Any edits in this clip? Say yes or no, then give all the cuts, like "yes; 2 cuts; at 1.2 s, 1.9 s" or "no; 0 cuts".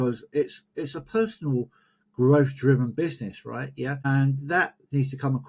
yes; 1 cut; at 4.0 s